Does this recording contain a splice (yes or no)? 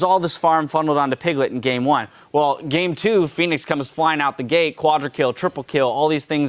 yes